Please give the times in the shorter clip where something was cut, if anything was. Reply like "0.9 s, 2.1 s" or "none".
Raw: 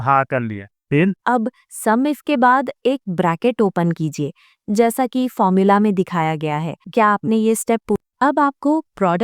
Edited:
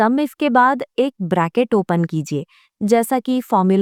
none